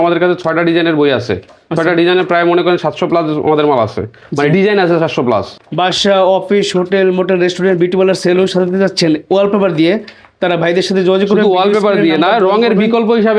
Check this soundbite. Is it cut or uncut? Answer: cut